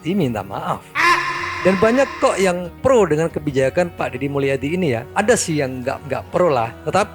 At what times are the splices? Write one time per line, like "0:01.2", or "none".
0:01.5

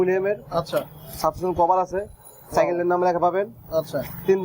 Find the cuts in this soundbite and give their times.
none

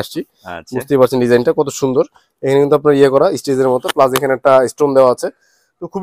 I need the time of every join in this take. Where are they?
none

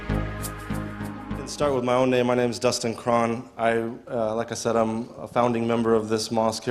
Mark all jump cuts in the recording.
none

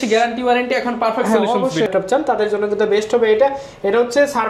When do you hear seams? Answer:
0:01.9

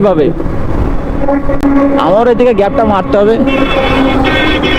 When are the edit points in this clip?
none

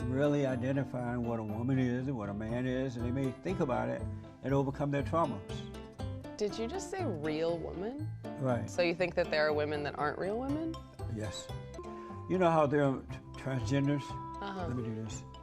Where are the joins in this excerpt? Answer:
0:11.9

